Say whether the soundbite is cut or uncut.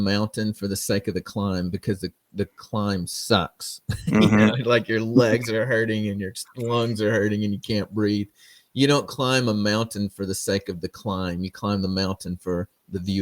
uncut